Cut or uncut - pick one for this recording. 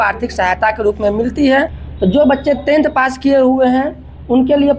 cut